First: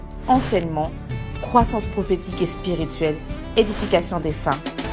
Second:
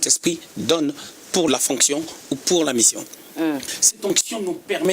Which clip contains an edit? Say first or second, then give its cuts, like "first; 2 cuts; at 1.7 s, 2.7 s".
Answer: second; 2 cuts; at 1.5 s, 3.7 s